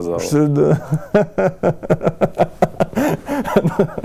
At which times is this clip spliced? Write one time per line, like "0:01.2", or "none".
none